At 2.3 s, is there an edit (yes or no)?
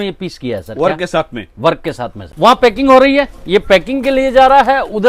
yes